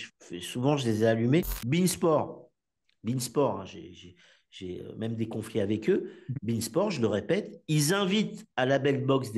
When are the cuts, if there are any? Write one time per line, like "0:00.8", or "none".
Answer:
0:01.6